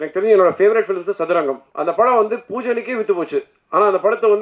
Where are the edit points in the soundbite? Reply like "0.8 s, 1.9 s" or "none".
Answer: 1.7 s